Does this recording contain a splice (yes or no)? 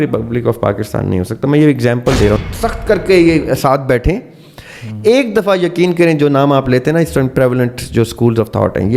yes